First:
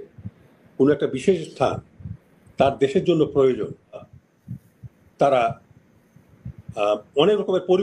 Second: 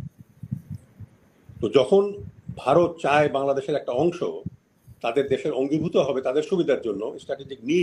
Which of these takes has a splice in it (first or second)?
first